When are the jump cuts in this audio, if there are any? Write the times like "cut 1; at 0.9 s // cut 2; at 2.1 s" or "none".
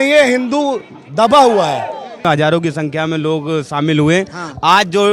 cut 1; at 2.2 s